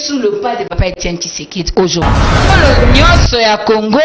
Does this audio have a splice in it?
yes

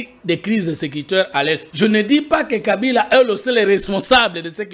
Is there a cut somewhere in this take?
yes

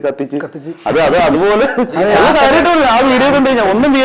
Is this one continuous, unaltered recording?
yes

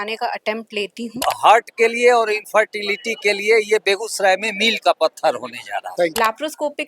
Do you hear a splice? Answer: yes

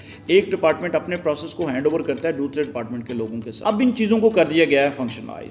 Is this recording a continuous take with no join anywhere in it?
no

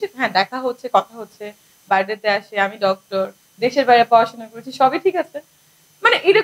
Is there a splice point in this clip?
no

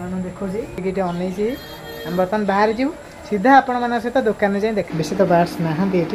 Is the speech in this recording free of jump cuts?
no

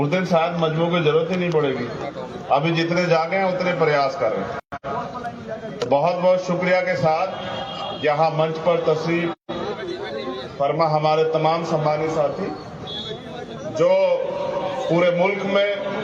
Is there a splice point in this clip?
no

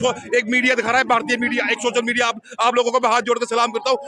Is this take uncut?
yes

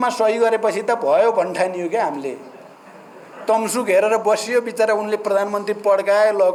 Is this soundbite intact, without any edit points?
yes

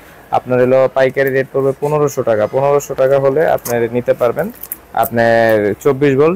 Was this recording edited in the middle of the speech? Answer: no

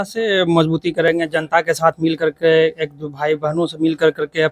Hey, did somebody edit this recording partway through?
no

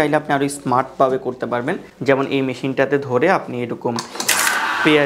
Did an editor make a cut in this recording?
no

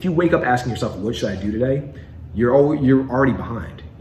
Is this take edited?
no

